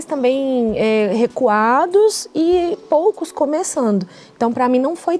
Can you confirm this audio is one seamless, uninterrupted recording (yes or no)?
yes